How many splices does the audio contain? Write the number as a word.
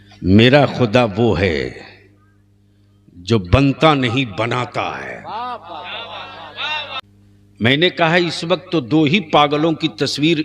one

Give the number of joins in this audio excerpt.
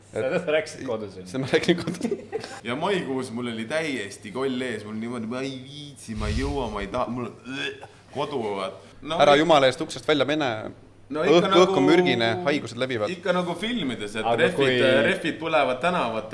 two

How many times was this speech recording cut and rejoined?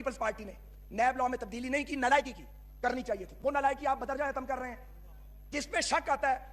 zero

